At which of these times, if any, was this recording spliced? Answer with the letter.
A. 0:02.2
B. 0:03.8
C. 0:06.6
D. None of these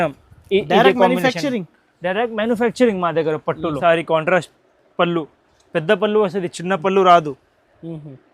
B